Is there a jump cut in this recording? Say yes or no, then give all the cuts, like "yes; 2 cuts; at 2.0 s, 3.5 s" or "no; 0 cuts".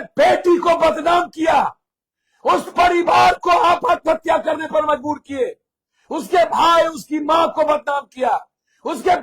no; 0 cuts